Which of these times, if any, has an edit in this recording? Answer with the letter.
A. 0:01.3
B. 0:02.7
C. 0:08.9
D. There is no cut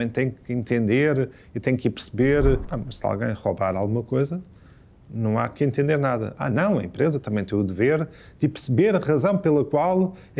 B